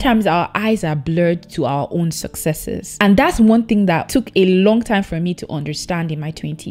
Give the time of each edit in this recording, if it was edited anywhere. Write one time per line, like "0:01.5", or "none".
none